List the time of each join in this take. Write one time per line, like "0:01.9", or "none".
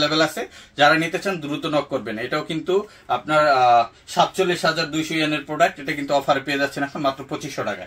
none